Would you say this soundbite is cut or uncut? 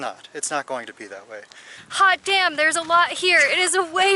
cut